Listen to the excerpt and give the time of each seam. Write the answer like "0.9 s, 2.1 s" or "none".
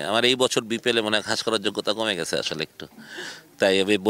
none